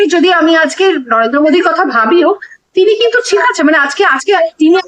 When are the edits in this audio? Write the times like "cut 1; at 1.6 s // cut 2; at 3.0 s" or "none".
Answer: none